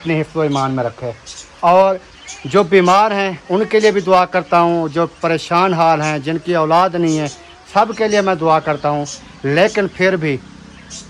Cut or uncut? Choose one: uncut